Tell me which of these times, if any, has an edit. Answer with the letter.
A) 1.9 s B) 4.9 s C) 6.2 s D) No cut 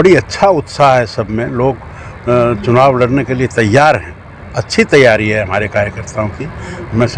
D